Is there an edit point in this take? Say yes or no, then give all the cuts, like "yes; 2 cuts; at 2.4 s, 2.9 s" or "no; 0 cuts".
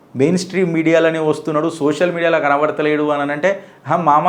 no; 0 cuts